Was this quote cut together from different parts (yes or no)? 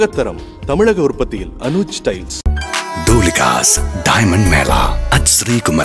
no